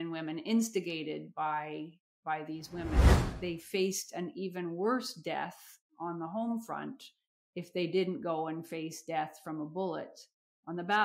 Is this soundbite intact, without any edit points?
no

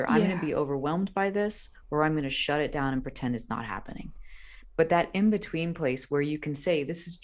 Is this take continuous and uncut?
yes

